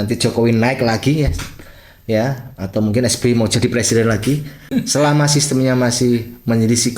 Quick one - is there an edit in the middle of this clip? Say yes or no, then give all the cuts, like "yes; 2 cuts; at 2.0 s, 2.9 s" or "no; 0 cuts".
yes; 1 cut; at 4.7 s